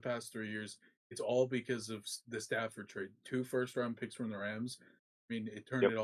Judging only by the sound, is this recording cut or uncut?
uncut